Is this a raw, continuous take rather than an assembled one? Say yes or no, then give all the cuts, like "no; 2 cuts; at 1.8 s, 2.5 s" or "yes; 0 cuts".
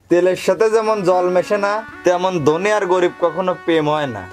no; 1 cut; at 1.9 s